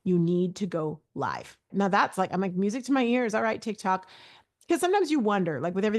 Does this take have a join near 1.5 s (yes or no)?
no